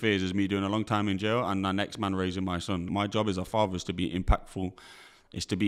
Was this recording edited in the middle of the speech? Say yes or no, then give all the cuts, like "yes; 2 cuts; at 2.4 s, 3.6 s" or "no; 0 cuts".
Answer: yes; 1 cut; at 2.9 s